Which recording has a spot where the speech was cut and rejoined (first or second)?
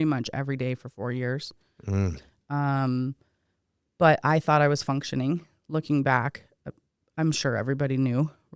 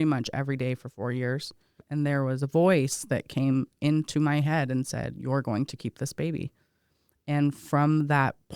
second